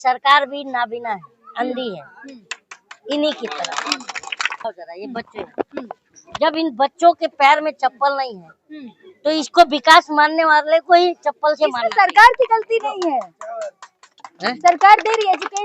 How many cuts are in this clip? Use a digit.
1